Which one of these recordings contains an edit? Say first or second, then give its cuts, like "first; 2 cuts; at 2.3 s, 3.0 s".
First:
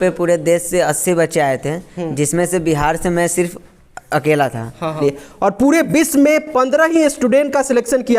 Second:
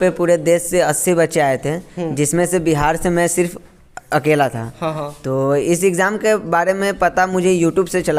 first; 1 cut; at 5.0 s